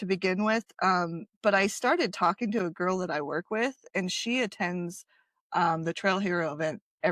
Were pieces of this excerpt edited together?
no; 0 cuts

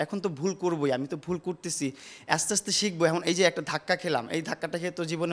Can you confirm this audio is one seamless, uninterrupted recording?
yes; 0 cuts

